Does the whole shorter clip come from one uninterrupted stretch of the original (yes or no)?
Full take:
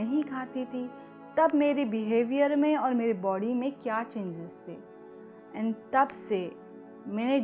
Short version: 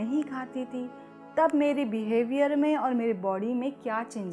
yes